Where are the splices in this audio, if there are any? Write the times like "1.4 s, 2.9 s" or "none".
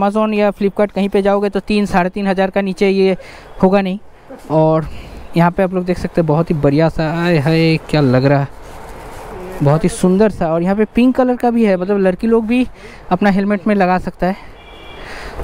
none